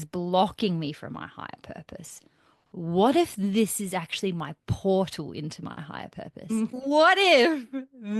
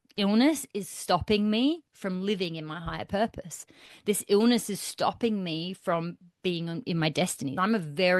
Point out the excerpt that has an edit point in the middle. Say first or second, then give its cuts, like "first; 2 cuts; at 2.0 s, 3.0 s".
first; 1 cut; at 6.8 s